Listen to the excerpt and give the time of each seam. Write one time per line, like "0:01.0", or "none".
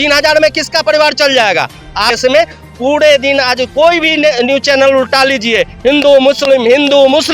0:02.1